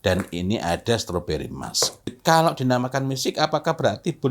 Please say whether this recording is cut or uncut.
cut